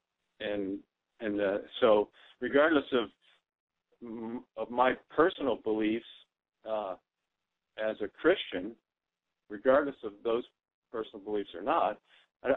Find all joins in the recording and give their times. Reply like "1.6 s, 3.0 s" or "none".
none